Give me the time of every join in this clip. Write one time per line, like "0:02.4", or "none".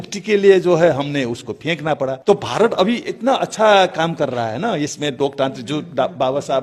0:02.2

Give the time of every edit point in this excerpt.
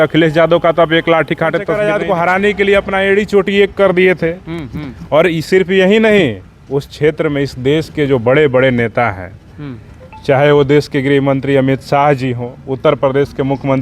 0:01.8

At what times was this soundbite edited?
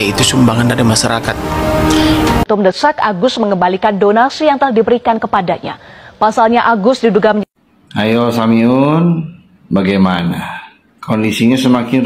0:02.5

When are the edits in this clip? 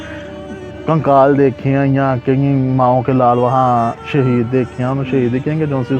none

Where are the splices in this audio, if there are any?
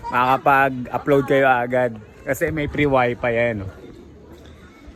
none

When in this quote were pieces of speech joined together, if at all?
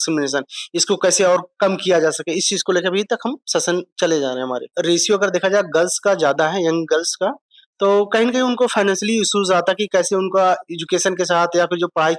0:04.7

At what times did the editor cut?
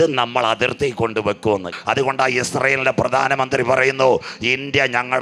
0:01.8

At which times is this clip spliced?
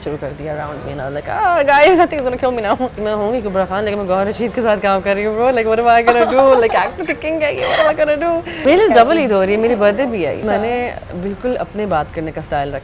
0:03.0
0:08.6
0:10.4

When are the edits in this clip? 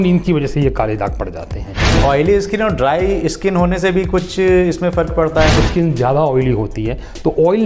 0:02.0
0:05.6

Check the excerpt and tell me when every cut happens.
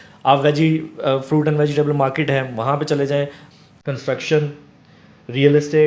0:03.4

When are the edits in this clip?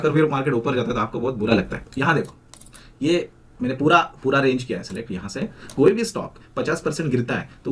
0:01.8
0:05.7

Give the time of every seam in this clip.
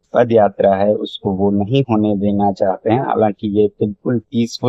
none

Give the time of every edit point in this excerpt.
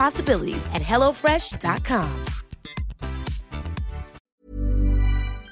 0:04.3

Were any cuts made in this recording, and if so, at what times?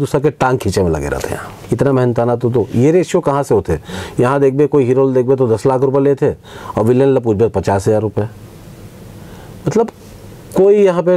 0:01.5

